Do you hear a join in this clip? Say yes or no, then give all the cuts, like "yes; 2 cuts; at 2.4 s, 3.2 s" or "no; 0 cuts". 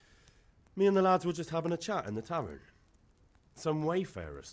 no; 0 cuts